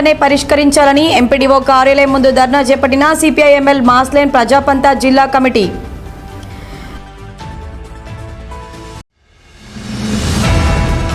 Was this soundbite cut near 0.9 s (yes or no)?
no